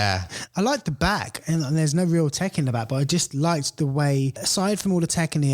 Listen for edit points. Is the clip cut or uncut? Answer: cut